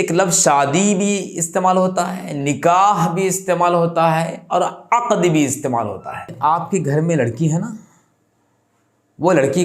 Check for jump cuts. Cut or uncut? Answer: cut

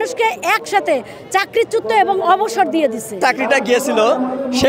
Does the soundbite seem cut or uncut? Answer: cut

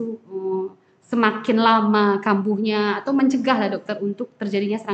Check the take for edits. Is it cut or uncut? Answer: uncut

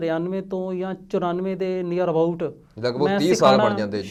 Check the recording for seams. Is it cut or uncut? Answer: uncut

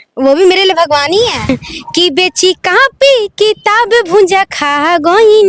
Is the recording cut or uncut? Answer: cut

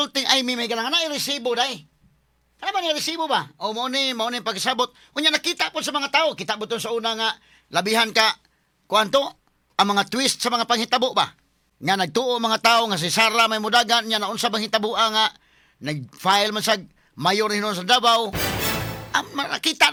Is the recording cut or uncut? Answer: uncut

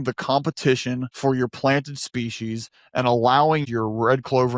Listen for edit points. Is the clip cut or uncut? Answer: cut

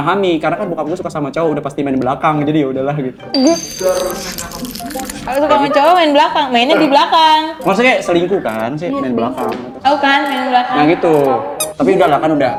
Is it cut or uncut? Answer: uncut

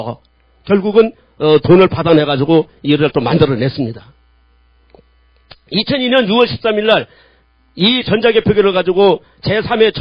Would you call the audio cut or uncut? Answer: uncut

